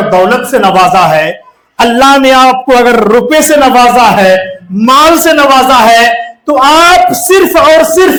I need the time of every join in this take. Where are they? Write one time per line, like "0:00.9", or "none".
none